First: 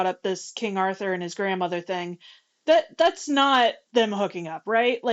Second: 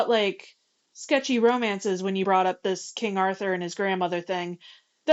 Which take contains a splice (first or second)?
first